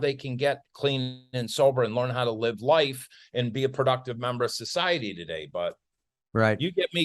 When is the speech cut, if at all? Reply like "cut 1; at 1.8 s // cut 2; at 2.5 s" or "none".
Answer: none

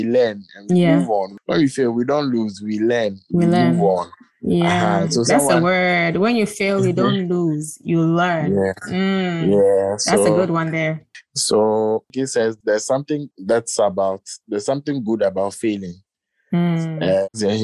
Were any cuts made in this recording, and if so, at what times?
none

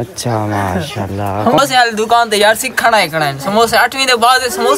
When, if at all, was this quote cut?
cut 1; at 1.6 s

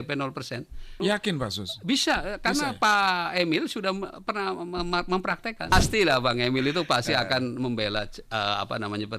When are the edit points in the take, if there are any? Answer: cut 1; at 0.9 s // cut 2; at 5.7 s

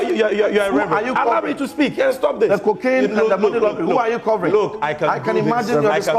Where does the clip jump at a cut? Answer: none

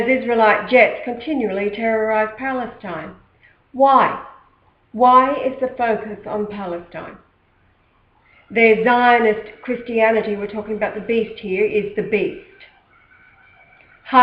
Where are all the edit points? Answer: none

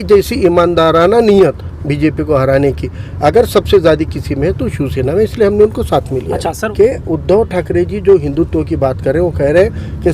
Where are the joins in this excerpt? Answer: cut 1; at 6.6 s

